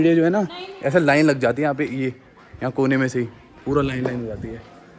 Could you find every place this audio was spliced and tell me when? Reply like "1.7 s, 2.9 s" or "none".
none